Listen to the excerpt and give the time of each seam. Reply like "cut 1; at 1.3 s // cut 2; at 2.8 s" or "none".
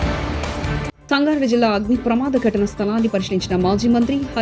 cut 1; at 0.9 s